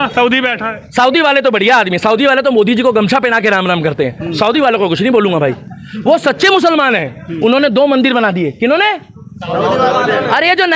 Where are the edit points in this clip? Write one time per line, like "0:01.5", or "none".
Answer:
none